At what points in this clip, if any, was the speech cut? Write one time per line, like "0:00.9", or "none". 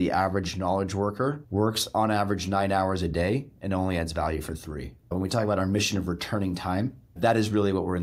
0:01.4